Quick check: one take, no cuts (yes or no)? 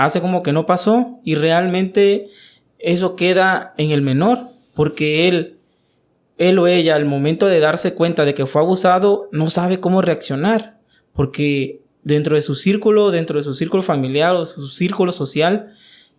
yes